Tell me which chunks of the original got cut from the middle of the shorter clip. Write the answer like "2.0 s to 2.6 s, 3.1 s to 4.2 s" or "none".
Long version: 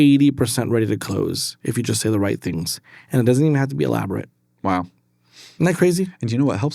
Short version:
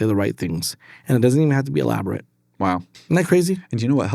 5.0 s to 5.4 s